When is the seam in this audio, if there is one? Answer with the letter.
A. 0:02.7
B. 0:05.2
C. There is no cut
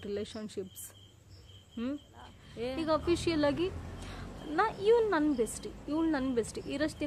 A